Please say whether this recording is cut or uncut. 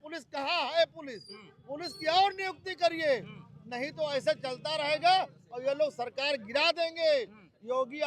uncut